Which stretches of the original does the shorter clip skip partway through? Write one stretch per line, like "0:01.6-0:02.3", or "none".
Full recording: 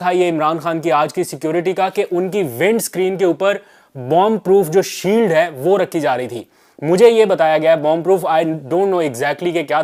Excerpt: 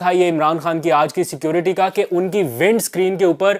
none